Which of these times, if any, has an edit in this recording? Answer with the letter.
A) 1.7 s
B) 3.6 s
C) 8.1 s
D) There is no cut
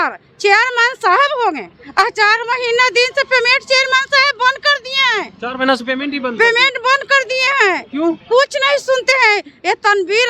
A